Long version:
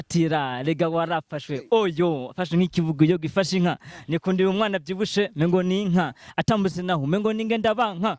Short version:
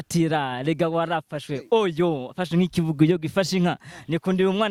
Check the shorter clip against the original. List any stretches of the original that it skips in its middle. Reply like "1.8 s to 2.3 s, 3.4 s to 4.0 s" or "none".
none